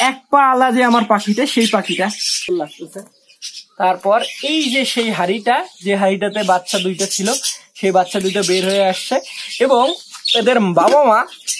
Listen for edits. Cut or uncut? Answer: cut